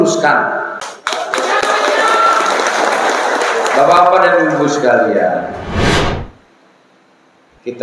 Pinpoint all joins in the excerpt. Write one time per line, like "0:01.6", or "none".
0:00.9